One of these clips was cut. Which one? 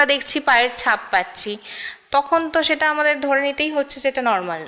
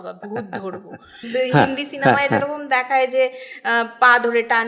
second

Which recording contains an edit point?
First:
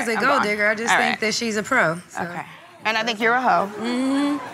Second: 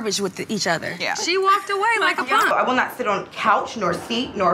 second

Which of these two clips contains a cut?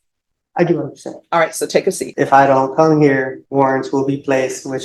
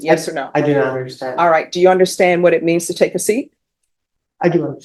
first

